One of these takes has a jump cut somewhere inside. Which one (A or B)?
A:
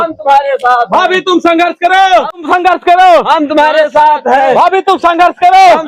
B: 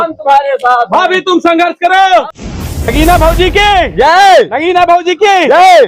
B